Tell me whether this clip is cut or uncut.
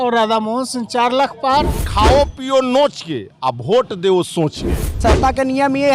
cut